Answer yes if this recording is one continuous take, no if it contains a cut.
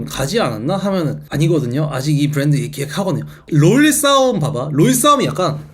no